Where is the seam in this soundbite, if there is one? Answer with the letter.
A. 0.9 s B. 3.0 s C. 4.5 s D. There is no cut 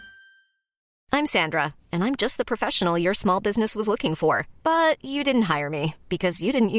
A